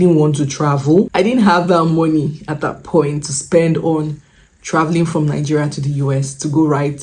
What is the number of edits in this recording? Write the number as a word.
one